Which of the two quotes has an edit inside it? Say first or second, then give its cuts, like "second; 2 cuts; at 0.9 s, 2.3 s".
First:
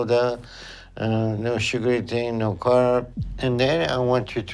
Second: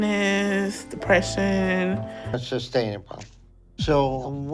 second; 1 cut; at 2.2 s